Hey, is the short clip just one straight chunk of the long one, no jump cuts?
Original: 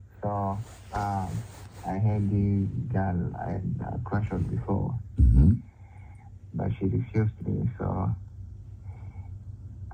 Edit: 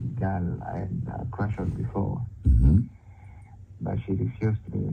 yes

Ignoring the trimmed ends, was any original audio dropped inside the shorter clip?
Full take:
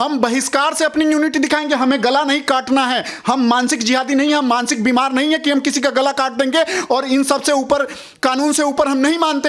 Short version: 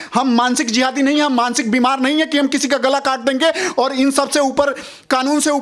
no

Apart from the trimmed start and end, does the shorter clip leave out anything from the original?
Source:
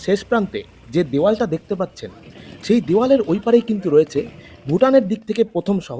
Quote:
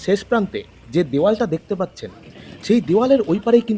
no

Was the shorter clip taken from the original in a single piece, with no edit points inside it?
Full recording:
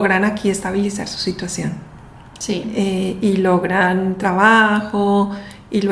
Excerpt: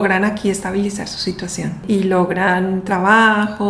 no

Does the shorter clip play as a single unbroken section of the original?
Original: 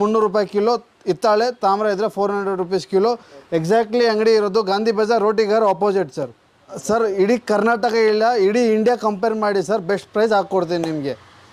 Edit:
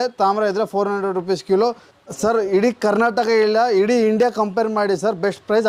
no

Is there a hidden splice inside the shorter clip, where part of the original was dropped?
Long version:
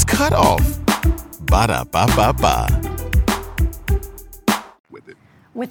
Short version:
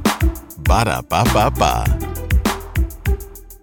no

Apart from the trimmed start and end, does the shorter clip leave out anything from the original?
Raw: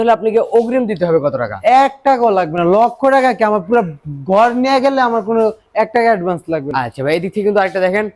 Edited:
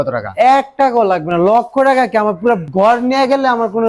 yes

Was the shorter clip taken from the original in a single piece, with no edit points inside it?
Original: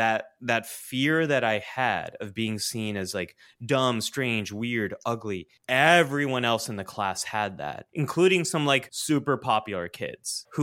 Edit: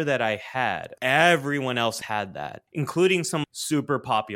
no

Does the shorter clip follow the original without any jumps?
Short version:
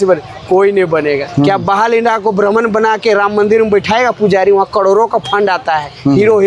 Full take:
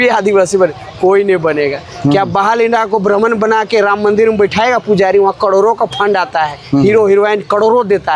no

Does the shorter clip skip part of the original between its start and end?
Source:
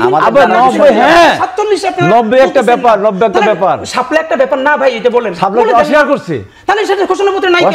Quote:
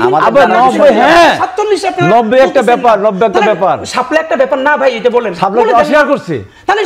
no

